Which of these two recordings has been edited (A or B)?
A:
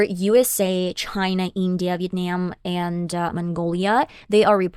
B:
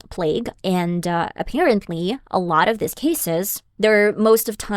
B